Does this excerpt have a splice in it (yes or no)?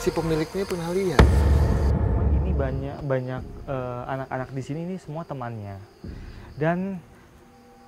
yes